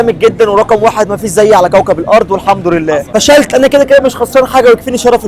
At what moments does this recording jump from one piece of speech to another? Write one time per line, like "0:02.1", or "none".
0:03.0